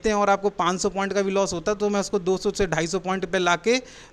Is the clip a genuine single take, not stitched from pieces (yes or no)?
yes